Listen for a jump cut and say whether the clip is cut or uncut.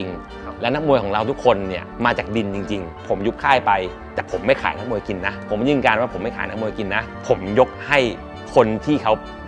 cut